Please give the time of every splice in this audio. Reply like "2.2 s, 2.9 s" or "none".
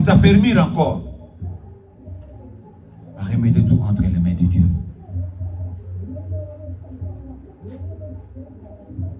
2.0 s